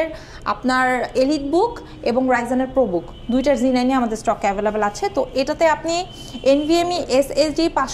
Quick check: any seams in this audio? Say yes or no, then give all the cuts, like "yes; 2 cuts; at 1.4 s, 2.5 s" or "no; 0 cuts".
no; 0 cuts